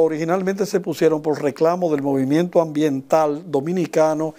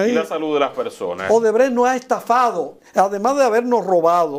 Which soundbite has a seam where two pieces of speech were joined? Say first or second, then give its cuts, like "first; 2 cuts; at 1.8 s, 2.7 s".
second; 2 cuts; at 1.1 s, 2.7 s